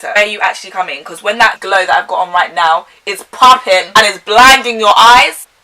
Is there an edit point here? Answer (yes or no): yes